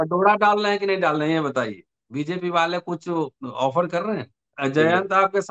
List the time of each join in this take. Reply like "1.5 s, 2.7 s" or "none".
4.6 s